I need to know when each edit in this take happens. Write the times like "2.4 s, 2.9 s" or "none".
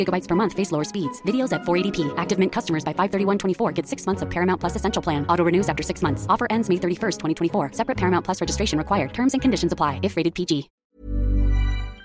10.8 s